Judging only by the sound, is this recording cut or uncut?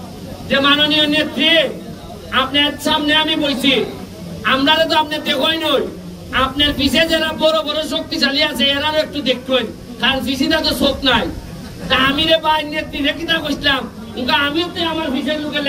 uncut